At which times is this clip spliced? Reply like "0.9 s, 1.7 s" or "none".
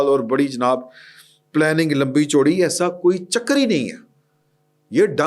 none